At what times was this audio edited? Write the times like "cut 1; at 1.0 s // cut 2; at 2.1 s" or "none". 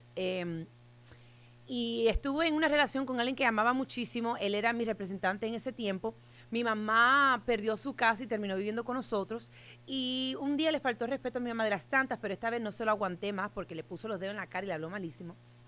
none